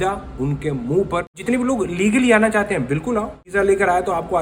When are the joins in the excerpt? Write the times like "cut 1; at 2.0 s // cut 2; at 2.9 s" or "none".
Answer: cut 1; at 1.4 s // cut 2; at 3.4 s